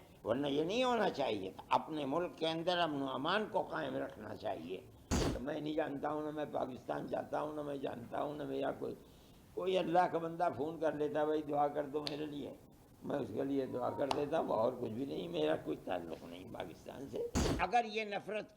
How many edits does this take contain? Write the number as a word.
two